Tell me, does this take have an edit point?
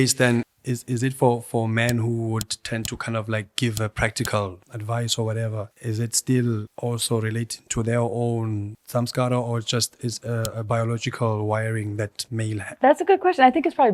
no; 0 cuts

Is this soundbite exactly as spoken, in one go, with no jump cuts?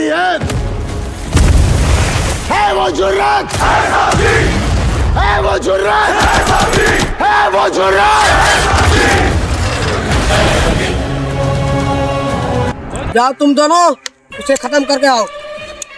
no; 1 cut; at 12.7 s

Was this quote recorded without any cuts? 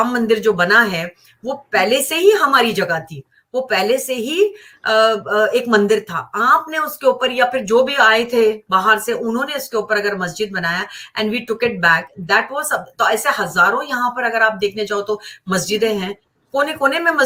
yes; 0 cuts

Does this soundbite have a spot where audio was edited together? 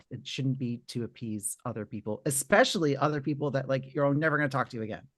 no; 0 cuts

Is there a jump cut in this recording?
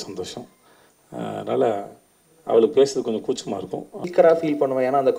yes; 1 cut; at 4.1 s

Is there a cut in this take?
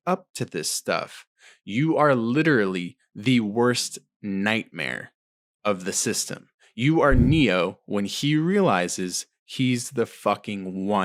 no; 0 cuts

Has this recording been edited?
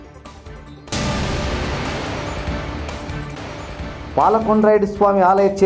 no; 0 cuts

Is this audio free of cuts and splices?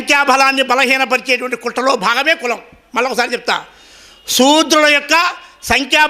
yes; 0 cuts

